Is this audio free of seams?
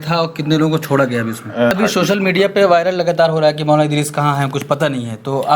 no; 1 cut; at 1.7 s

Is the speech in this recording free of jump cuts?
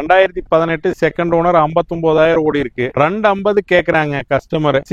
yes; 0 cuts

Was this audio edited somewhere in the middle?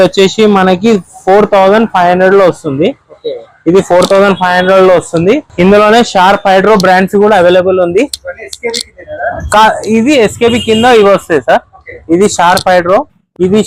no; 0 cuts

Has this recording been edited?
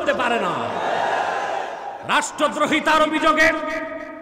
yes; 1 cut; at 1.9 s

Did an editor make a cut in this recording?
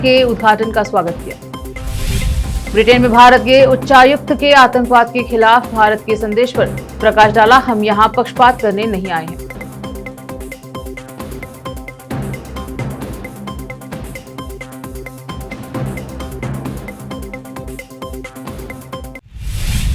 yes; 1 cut; at 19.0 s

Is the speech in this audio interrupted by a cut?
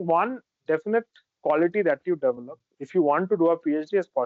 no; 0 cuts

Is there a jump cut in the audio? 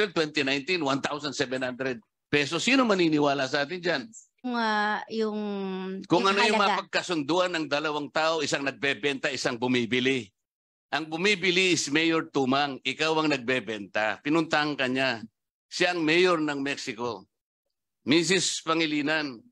yes; 1 cut; at 4.5 s

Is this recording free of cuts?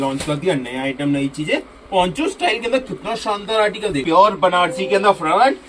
no; 1 cut; at 4.0 s

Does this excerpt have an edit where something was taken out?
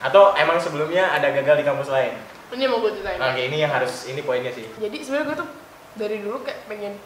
no; 0 cuts

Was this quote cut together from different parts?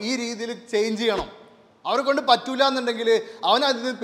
no; 0 cuts

